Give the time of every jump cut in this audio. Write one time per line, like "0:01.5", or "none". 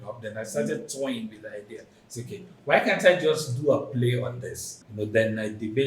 0:04.8